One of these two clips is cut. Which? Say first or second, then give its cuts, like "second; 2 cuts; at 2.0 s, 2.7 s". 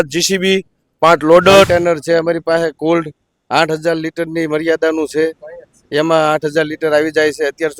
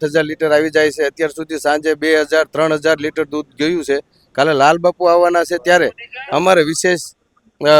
first; 1 cut; at 1.7 s